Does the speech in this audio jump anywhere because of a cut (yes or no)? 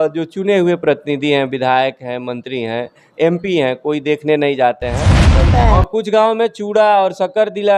yes